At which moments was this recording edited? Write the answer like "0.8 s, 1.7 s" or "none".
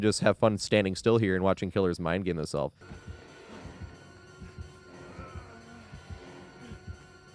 2.8 s